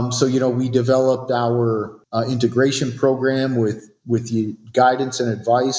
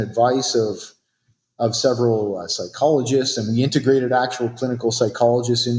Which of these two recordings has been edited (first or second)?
first